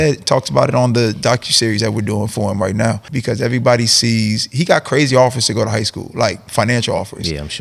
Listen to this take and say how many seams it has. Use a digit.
1